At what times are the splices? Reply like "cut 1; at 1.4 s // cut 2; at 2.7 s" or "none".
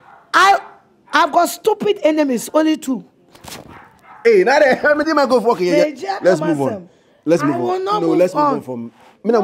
none